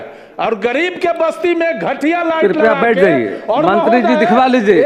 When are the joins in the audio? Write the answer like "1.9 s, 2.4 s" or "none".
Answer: none

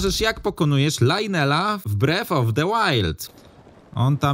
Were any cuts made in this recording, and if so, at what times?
1.9 s, 3.2 s

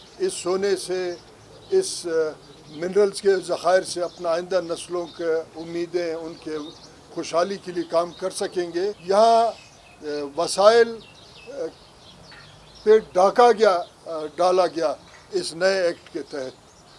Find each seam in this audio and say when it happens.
9.0 s

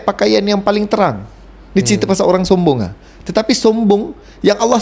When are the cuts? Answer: none

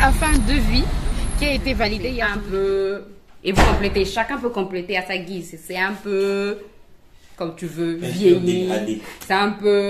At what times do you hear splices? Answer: 2.3 s

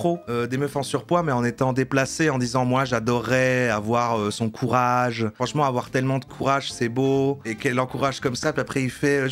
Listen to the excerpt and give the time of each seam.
5.3 s, 7.4 s

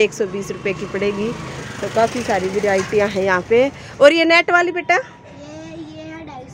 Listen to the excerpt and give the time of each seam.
none

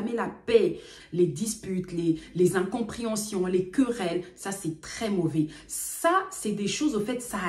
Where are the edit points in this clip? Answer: 0.9 s

